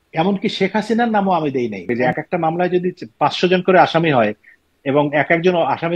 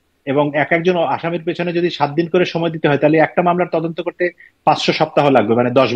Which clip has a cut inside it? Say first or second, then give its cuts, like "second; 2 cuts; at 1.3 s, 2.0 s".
first; 1 cut; at 1.9 s